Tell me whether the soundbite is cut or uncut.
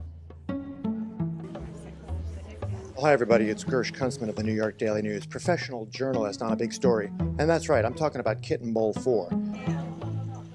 uncut